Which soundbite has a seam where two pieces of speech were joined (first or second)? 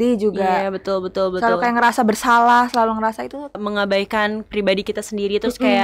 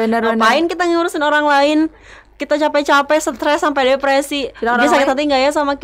first